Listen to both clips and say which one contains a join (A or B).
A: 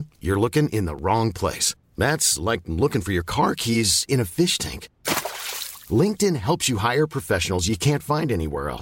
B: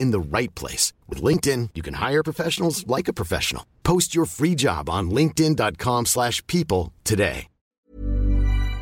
B